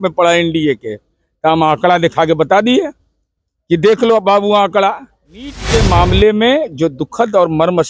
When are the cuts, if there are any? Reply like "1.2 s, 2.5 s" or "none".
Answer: 5.6 s